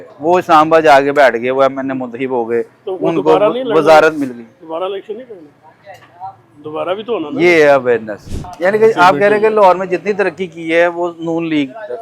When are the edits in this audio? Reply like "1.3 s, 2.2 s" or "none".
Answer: 8.4 s